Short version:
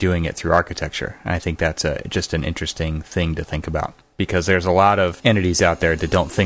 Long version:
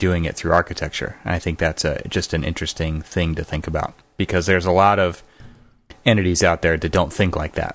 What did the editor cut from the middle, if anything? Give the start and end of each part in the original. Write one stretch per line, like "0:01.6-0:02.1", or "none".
0:05.2-0:06.0